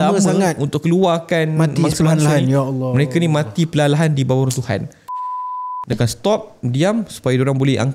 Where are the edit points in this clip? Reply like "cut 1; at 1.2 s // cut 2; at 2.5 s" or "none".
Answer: cut 1; at 5.4 s